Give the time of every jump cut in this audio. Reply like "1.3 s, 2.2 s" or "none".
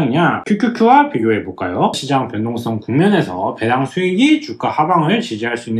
2.0 s